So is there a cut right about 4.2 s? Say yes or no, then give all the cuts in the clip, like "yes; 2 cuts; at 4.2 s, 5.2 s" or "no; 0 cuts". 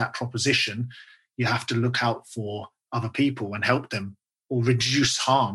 yes; 1 cut; at 4.2 s